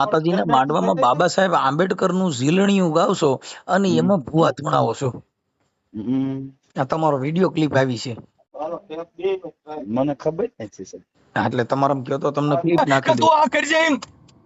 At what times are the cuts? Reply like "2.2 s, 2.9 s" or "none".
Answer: 12.9 s